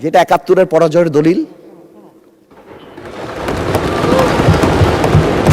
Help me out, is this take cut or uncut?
uncut